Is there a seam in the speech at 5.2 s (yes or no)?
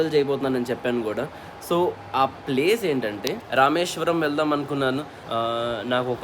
yes